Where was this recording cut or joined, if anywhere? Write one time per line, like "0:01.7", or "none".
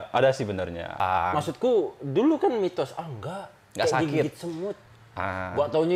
0:01.0